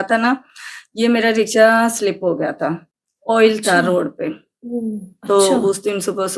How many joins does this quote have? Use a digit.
0